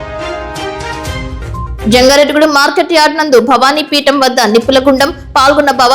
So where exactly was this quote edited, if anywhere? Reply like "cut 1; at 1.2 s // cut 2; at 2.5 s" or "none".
cut 1; at 1.8 s